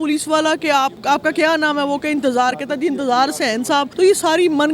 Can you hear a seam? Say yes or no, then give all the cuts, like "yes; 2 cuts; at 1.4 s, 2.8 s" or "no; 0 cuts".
yes; 2 cuts; at 1.0 s, 3.9 s